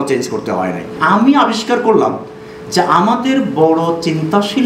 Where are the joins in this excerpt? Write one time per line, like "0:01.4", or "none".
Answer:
0:01.0